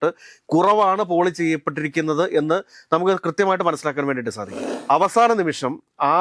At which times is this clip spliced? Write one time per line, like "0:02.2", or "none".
0:04.7